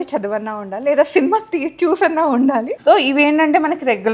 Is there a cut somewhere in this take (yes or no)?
yes